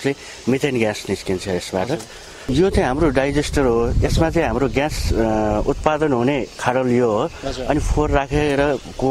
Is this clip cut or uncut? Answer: cut